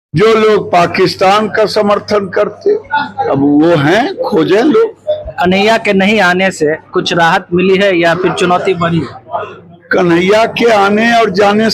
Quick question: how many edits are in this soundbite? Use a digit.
0